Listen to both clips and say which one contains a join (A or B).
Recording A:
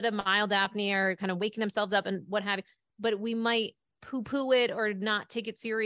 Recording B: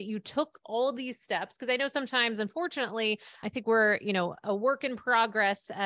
B